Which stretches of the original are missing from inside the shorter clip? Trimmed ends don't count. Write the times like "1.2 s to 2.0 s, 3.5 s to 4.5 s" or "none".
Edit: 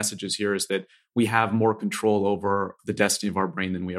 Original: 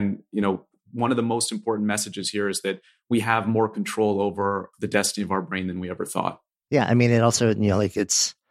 none